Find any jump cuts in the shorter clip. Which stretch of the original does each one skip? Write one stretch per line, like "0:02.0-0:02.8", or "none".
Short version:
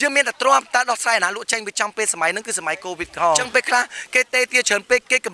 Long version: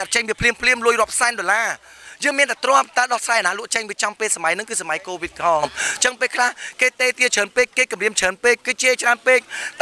0:05.6-0:06.0